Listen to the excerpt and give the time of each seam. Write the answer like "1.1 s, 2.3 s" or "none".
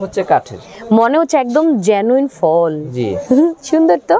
none